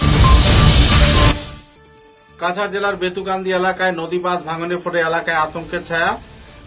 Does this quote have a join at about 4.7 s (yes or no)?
no